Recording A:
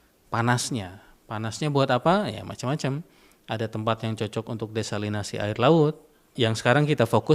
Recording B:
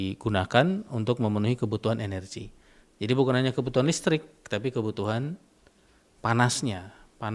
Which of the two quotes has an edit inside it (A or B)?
A